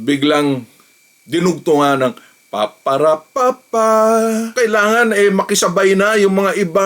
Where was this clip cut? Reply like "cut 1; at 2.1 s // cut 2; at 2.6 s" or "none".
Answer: cut 1; at 4.5 s